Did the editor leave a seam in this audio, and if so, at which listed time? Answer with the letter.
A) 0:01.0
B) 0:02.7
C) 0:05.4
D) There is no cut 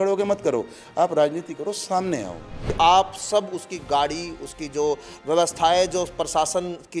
B